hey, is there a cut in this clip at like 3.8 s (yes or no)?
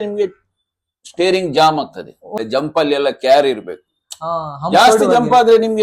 no